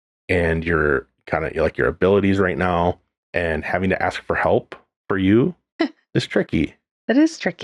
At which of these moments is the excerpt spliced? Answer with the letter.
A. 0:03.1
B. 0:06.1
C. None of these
C